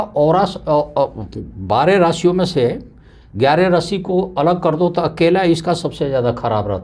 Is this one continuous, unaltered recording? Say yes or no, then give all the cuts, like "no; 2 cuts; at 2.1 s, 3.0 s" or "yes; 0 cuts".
yes; 0 cuts